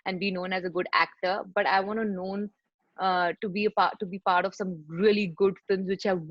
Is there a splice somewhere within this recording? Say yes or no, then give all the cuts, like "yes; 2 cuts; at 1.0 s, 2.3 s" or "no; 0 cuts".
no; 0 cuts